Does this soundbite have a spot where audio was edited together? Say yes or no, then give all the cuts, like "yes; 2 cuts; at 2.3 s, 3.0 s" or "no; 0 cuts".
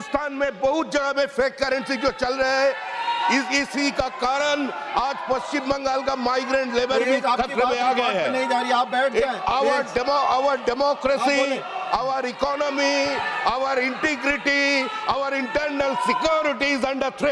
no; 0 cuts